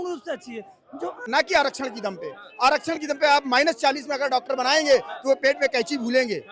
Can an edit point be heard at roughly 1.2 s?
yes; 1 cut; at 1.2 s

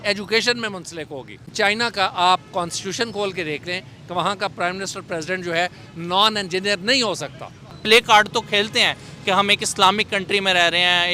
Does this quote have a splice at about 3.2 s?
no; 2 cuts; at 1.4 s, 7.7 s

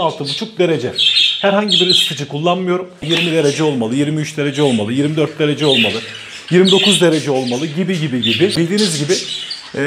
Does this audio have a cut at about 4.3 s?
no; 2 cuts; at 3.0 s, 8.5 s

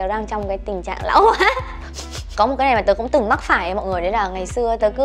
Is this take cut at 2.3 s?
yes; 1 cut; at 2.3 s

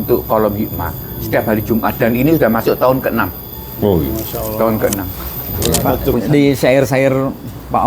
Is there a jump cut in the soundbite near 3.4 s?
no; 1 cut; at 6.1 s

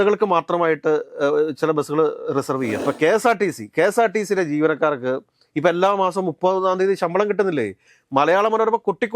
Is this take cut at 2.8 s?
yes; 1 cut; at 2.8 s

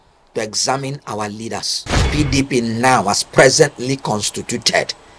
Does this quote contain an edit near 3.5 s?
no; 1 cut; at 2.1 s

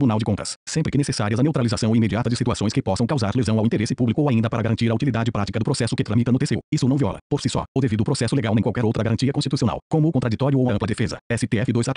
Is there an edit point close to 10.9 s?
yes; 2 cuts; at 6.9 s, 10.9 s

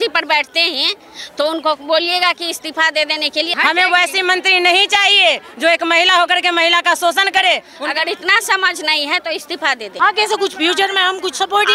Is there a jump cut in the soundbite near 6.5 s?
no; 3 cuts; at 3.5 s, 7.7 s, 9.9 s

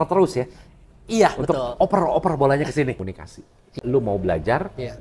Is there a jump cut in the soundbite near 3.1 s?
yes; 1 cut; at 3.1 s

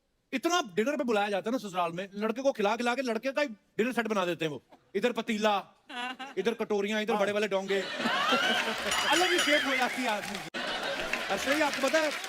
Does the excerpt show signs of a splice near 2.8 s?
no; 1 cut; at 10.5 s

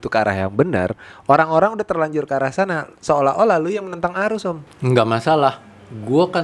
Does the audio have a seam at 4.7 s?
yes; 1 cut; at 4.7 s

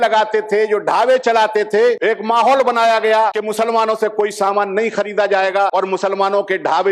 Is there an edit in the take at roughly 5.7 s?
yes; 3 cuts; at 2.0 s, 3.4 s, 5.7 s

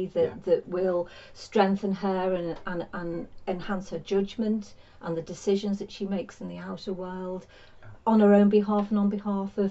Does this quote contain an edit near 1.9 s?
no; 0 cuts

